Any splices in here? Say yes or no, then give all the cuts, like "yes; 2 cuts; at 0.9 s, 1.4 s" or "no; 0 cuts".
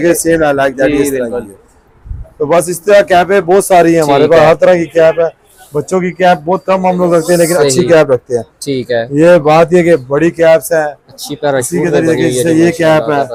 no; 0 cuts